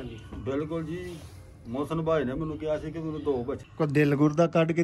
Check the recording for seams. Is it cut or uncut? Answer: cut